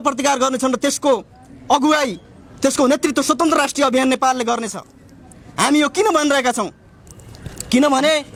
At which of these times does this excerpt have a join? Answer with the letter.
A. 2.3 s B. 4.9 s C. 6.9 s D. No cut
D